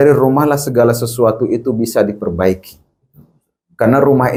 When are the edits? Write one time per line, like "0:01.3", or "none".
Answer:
none

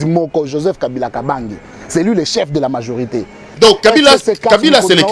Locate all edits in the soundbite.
0:03.6

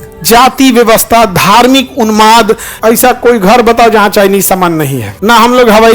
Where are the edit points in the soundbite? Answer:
0:02.7
0:05.0

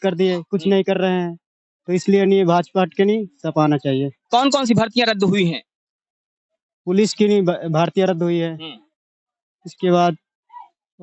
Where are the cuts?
0:04.2

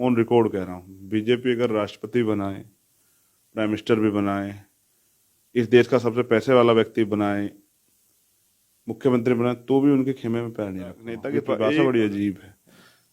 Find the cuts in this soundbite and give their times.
0:11.5

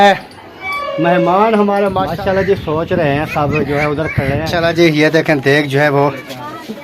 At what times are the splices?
0:02.0
0:04.5

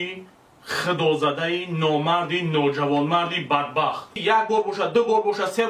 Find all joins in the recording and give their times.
0:04.1

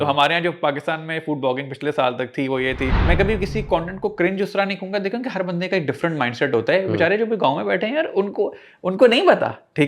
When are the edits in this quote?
0:03.0

